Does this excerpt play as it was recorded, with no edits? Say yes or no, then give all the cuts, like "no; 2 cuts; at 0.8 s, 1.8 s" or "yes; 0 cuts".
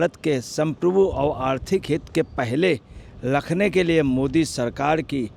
yes; 0 cuts